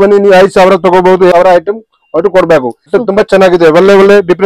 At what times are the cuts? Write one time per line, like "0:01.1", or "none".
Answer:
0:01.3
0:02.9